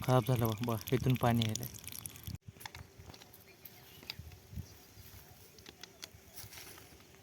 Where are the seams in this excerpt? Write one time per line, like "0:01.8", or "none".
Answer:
0:02.4